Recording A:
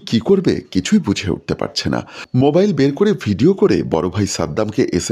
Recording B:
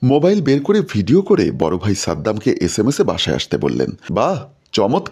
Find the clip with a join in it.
B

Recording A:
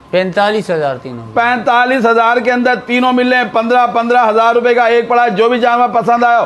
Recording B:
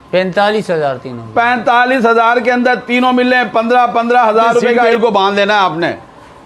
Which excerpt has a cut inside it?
B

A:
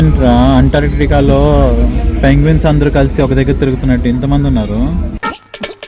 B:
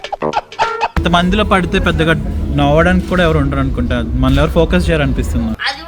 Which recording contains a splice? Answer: B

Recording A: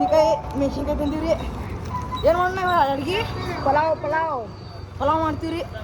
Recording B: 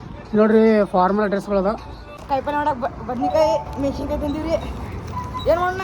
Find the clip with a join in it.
B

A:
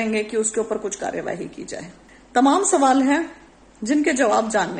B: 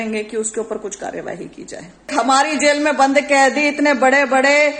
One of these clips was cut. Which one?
B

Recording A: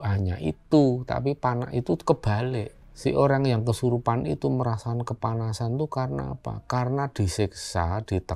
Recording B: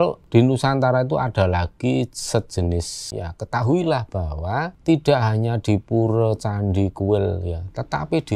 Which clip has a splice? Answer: B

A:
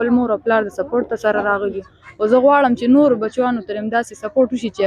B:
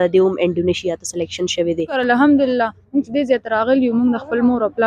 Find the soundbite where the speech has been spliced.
B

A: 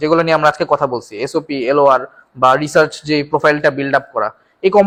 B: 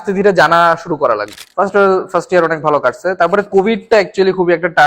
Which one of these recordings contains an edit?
B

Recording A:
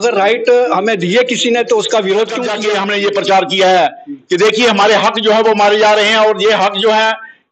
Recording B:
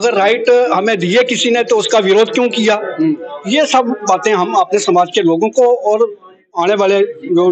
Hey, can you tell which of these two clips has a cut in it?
A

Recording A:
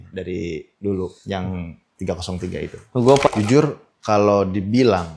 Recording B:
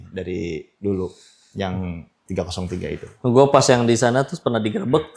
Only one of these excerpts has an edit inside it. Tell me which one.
A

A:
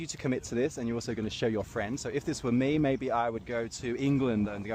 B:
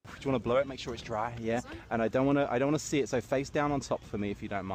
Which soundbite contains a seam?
A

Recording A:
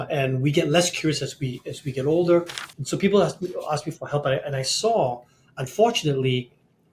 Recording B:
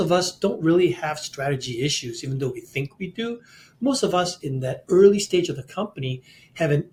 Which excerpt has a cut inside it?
A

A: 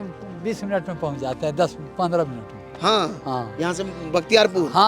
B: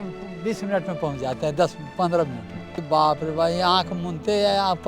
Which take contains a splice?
B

